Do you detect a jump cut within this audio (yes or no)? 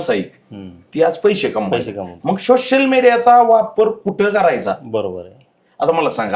no